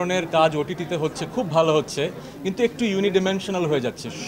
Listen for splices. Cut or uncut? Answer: uncut